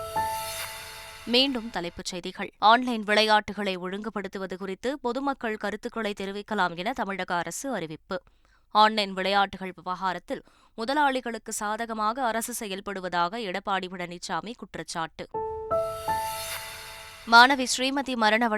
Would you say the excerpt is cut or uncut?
uncut